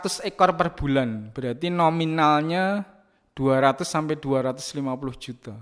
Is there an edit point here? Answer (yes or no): no